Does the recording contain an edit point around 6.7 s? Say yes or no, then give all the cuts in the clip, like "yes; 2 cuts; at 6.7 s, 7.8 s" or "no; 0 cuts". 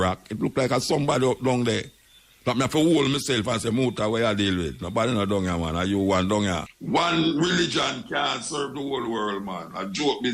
yes; 1 cut; at 6.7 s